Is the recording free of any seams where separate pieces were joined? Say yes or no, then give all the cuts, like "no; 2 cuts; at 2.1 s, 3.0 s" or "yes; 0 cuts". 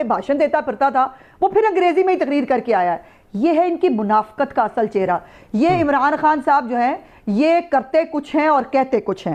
yes; 0 cuts